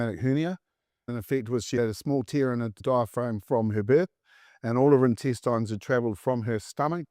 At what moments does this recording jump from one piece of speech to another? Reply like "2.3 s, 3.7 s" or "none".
1.1 s